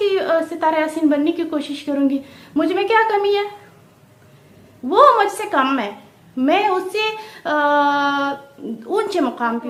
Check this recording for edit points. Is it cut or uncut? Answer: uncut